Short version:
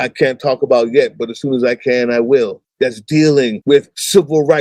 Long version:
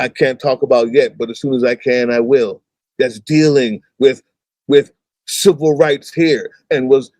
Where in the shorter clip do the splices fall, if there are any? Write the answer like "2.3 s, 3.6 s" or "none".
2.6 s, 3.7 s